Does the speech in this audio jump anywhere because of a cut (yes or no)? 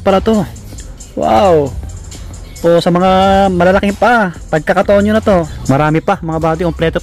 yes